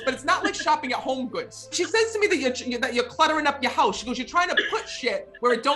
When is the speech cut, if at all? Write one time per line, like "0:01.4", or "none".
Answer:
0:01.7